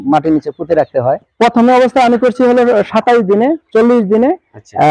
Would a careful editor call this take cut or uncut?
cut